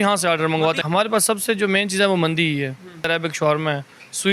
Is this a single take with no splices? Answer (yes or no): no